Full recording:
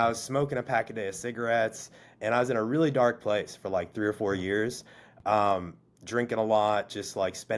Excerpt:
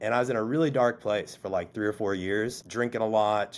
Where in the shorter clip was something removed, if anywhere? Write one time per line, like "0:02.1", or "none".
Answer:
0:02.6